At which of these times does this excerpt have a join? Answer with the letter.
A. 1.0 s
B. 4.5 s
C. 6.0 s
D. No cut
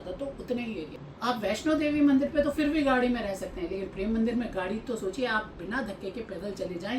A